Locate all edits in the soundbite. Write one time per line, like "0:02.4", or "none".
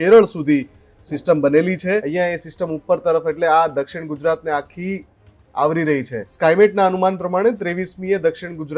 0:02.1
0:06.2